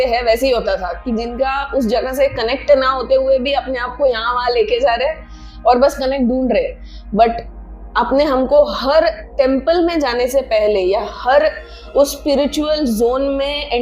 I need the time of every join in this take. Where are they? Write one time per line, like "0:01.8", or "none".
none